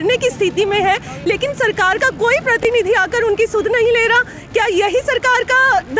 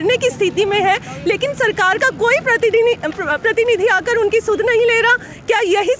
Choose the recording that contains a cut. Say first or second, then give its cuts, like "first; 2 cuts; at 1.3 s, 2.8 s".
first; 1 cut; at 2.6 s